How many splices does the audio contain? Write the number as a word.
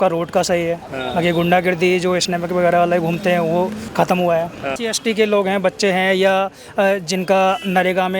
two